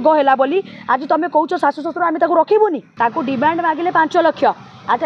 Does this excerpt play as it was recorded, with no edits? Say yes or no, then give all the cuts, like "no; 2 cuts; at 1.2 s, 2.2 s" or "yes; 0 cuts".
no; 1 cut; at 2.9 s